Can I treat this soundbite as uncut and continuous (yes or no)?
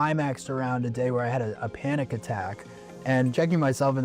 yes